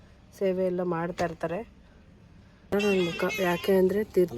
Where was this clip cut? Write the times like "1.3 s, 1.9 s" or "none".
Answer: 2.7 s

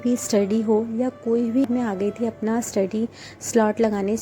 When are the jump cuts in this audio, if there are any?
1.6 s

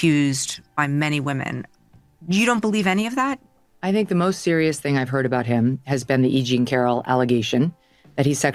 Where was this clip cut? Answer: none

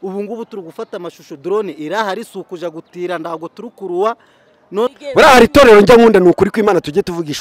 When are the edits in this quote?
5.0 s

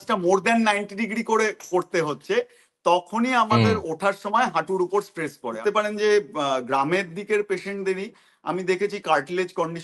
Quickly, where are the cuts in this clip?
5.6 s

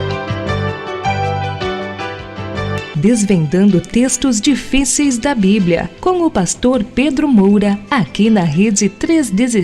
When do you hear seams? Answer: 7.8 s

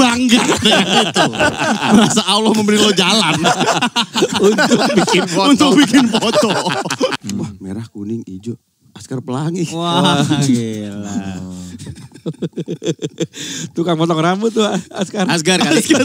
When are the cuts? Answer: 7.2 s

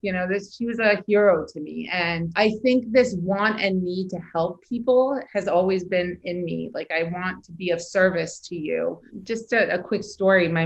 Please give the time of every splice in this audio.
2.2 s, 9.1 s

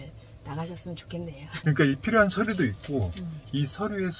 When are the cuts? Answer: 1.6 s

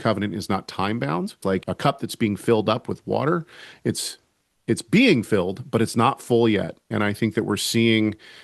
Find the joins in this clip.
1.6 s, 6.9 s

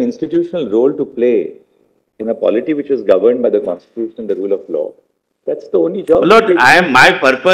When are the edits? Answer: none

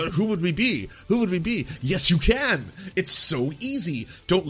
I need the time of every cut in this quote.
none

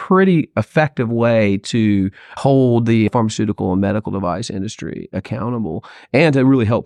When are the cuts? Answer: 2.4 s, 3.1 s

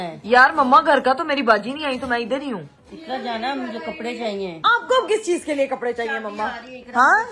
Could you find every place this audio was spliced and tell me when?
none

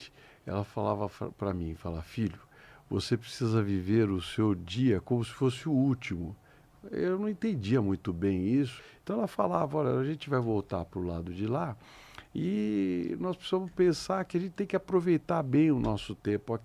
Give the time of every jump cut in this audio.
8.7 s

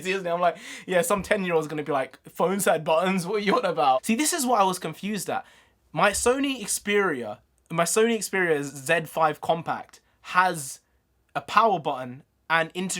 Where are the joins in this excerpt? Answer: 4.0 s

